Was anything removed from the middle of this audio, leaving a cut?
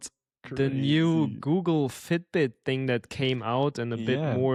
no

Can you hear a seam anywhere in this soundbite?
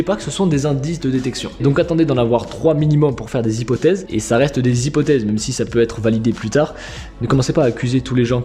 no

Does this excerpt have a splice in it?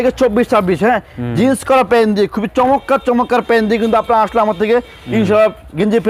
no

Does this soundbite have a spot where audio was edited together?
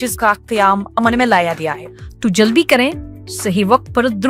yes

